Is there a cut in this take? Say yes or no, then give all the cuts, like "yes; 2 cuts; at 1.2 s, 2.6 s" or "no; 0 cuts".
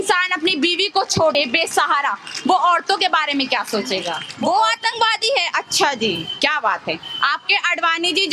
yes; 2 cuts; at 1.3 s, 4.2 s